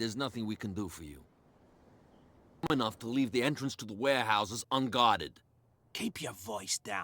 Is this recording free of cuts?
no; 1 cut; at 2.7 s

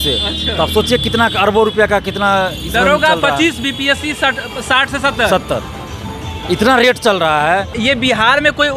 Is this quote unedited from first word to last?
no; 1 cut; at 7.8 s

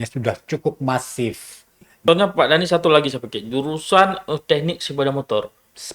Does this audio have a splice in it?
yes; 1 cut; at 2.0 s

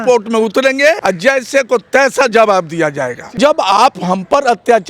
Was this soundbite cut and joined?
yes; 2 cuts; at 1.0 s, 3.3 s

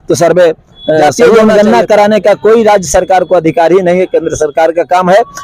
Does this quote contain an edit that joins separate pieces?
yes; 1 cut; at 1.2 s

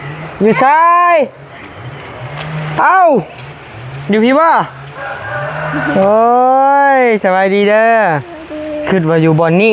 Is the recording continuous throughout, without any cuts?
yes; 0 cuts

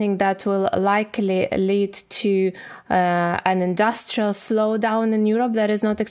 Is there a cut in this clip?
no; 0 cuts

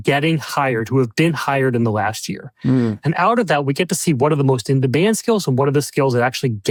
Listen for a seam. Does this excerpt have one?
no; 0 cuts

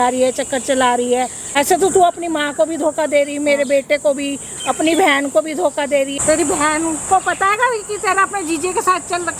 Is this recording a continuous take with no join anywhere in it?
no; 2 cuts; at 1.4 s, 6.1 s

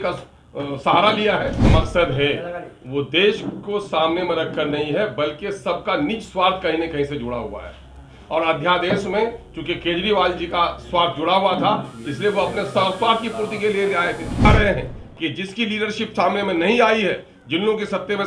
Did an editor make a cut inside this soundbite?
yes; 2 cuts; at 1.7 s, 14.4 s

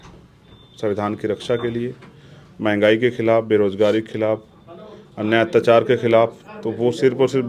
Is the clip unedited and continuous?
yes; 0 cuts

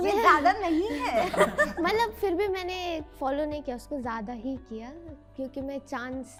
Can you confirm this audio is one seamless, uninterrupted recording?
yes; 0 cuts

